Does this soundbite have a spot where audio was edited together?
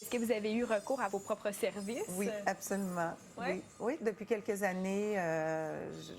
yes; 1 cut; at 1.1 s

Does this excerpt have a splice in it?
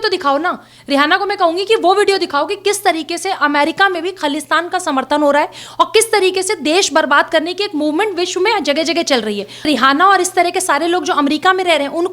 yes; 1 cut; at 9.7 s

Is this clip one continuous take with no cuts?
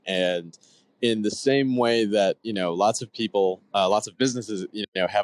yes; 0 cuts

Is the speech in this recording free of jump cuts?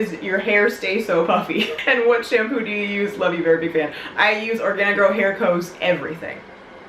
yes; 0 cuts

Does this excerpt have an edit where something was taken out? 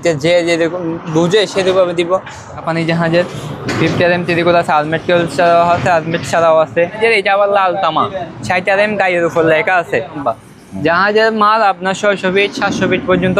yes; 3 cuts; at 2.7 s, 6.9 s, 10.2 s

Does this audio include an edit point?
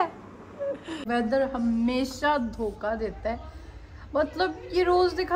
yes; 1 cut; at 1.0 s

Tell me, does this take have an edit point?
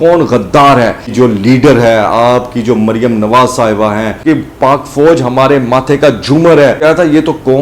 yes; 3 cuts; at 1.1 s, 4.2 s, 6.8 s

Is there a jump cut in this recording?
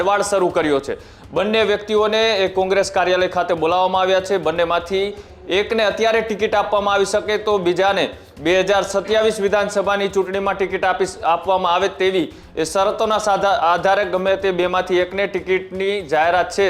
no; 0 cuts

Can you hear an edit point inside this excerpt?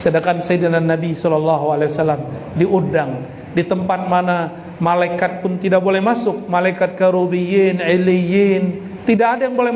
no; 0 cuts

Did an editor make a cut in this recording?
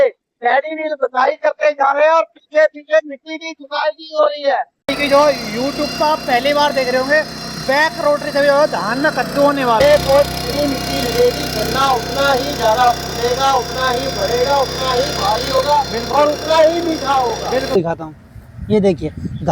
yes; 3 cuts; at 4.9 s, 9.8 s, 17.8 s

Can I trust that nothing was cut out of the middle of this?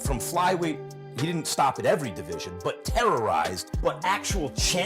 no; 1 cut; at 3.7 s

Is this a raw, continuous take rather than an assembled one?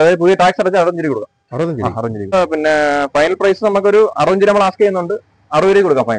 no; 1 cut; at 2.3 s

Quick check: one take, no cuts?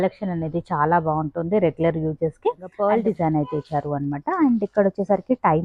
no; 1 cut; at 2.7 s

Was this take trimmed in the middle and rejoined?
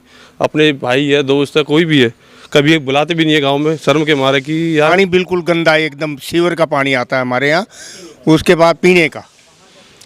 yes; 1 cut; at 4.9 s

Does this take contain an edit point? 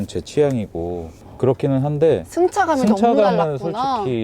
yes; 1 cut; at 1.2 s

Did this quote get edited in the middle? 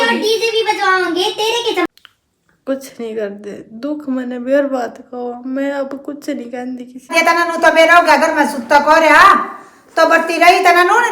yes; 2 cuts; at 1.9 s, 7.1 s

